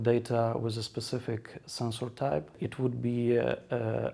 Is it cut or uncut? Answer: uncut